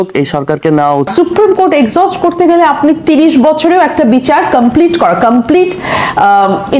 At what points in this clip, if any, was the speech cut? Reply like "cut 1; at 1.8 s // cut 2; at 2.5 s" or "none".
cut 1; at 1.1 s

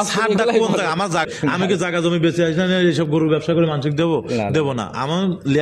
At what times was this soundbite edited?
cut 1; at 1.3 s

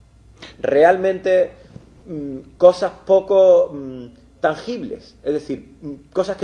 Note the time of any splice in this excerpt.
cut 1; at 3.6 s

